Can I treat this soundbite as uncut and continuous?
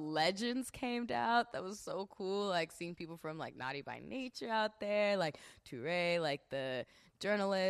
no; 1 cut; at 1.6 s

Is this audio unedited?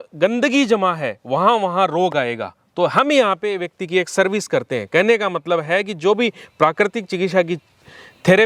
yes; 0 cuts

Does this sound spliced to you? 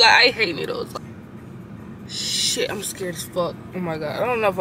yes; 1 cut; at 0.9 s

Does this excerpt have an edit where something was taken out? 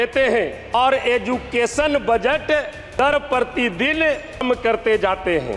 yes; 3 cuts; at 0.7 s, 3.0 s, 4.4 s

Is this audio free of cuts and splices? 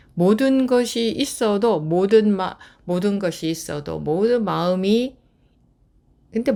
yes; 0 cuts

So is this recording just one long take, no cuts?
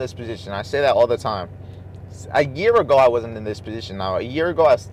yes; 0 cuts

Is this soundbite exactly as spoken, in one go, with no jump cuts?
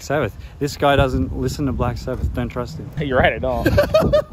no; 1 cut; at 2.8 s

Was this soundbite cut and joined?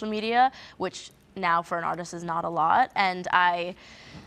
no; 0 cuts

